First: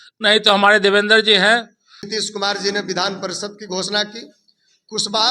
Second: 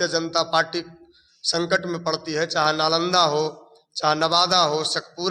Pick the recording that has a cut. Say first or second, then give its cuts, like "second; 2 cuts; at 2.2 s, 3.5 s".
first; 1 cut; at 2.1 s